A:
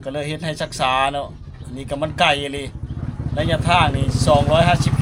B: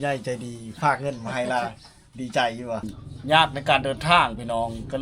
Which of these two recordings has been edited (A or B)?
B